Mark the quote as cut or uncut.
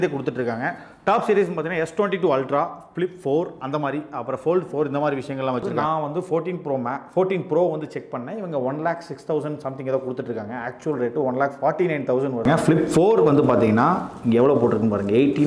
cut